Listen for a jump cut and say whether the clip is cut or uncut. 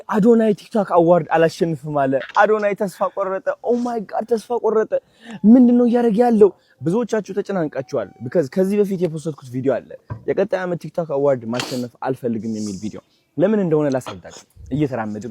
uncut